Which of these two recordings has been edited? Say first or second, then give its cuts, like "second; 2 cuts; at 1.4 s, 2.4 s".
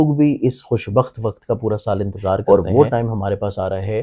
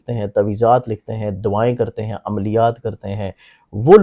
first; 1 cut; at 2.4 s